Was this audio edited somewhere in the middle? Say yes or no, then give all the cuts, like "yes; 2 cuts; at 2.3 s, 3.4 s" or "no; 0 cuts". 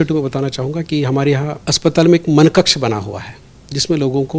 yes; 1 cut; at 1.6 s